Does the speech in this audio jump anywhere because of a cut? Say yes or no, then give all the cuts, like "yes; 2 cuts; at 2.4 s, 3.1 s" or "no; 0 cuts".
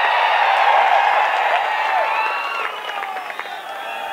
no; 0 cuts